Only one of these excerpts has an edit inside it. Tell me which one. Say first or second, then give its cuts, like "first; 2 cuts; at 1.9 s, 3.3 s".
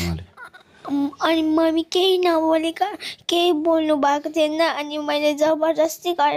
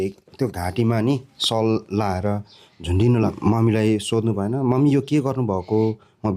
second; 1 cut; at 3.3 s